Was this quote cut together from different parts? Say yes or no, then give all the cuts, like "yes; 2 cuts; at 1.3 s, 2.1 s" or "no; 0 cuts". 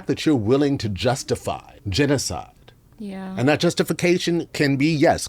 yes; 1 cut; at 1.8 s